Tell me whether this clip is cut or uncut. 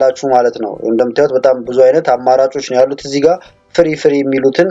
uncut